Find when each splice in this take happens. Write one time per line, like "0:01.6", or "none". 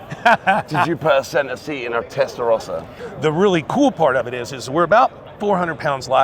0:02.9